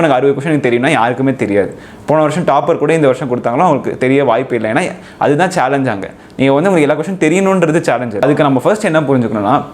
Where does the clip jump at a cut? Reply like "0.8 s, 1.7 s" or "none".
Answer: 8.2 s